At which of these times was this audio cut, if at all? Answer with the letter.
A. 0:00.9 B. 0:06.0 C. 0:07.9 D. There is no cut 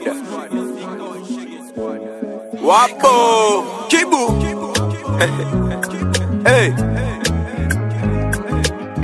D